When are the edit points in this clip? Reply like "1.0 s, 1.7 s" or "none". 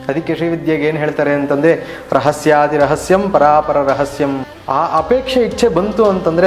4.5 s